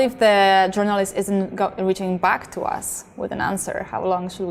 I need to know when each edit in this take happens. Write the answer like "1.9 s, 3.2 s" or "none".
none